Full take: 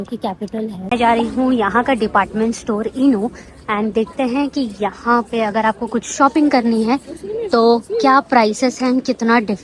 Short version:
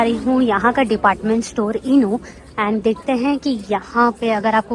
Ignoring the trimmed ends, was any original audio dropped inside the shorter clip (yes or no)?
no